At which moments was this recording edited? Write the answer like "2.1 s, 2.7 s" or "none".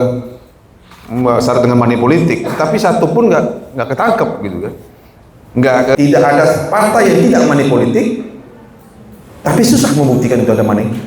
6.0 s